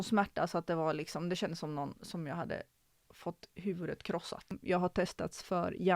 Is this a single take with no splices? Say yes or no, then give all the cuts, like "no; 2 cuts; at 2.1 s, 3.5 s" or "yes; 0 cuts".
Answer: no; 1 cut; at 4.6 s